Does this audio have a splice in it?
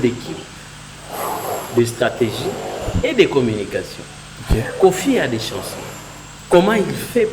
no; 0 cuts

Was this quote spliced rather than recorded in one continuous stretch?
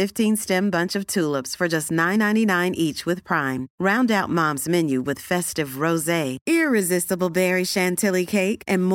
no; 0 cuts

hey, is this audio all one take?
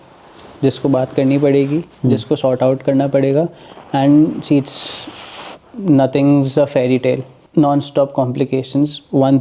no; 1 cut; at 7.3 s

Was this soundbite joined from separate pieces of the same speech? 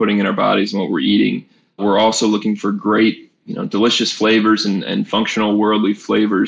no; 0 cuts

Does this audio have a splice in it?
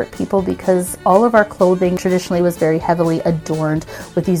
yes; 2 cuts; at 0.9 s, 2.0 s

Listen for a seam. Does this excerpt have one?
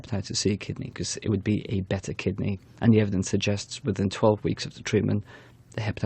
yes; 1 cut; at 2.6 s

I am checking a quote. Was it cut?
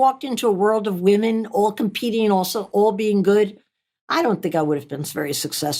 no; 0 cuts

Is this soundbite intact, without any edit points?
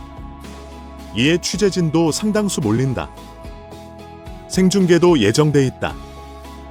yes; 0 cuts

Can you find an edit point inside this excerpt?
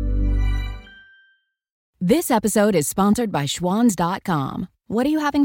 yes; 1 cut; at 1.8 s

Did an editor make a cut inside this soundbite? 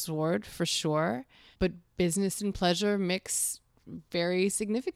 yes; 1 cut; at 1.4 s

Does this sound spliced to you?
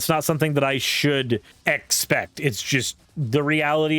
yes; 2 cuts; at 1.5 s, 3.0 s

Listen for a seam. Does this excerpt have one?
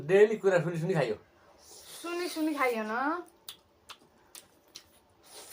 no; 0 cuts

